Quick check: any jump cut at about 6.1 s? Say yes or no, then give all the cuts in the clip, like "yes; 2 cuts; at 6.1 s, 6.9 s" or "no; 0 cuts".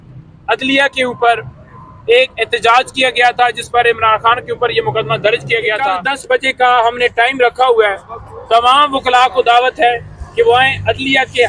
yes; 1 cut; at 6.1 s